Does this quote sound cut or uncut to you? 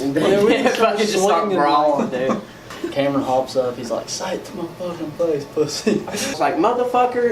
cut